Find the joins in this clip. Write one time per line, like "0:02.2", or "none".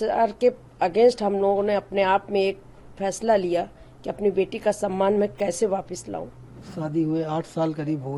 0:06.6